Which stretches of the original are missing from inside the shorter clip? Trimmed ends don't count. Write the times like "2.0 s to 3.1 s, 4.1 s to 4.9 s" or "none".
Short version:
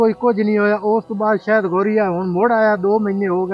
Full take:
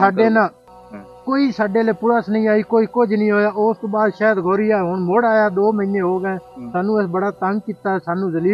none